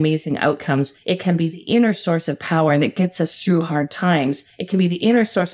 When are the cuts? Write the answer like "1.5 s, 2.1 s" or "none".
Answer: 1.0 s, 4.5 s